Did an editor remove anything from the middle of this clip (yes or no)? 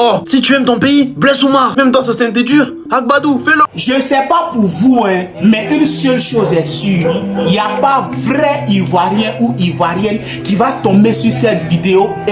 yes